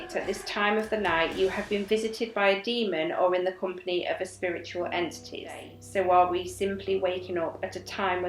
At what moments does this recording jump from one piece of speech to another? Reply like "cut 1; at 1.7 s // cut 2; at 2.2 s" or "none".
cut 1; at 5.7 s